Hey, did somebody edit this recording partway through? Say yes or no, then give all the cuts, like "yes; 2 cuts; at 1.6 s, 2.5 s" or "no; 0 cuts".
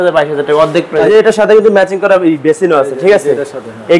yes; 1 cut; at 1.1 s